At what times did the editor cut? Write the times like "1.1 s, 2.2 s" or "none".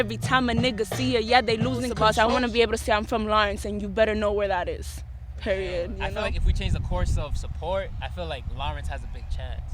1.9 s, 6.0 s